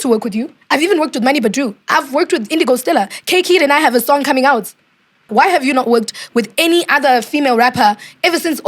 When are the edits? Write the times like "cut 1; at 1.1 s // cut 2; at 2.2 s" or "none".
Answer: cut 1; at 5.3 s